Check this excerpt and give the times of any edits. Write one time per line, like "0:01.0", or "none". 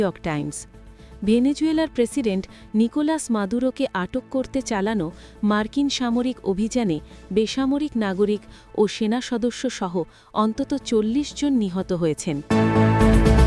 0:12.4